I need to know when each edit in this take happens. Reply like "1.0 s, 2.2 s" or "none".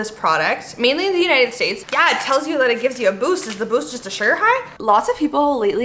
1.8 s, 4.8 s

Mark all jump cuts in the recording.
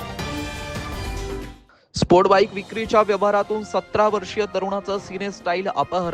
1.2 s

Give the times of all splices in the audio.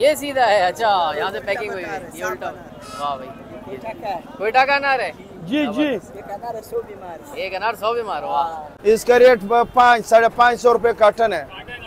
8.6 s

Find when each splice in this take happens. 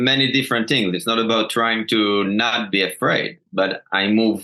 none

